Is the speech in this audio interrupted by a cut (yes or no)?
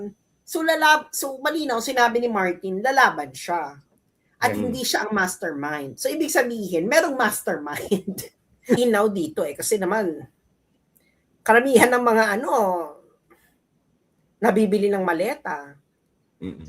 yes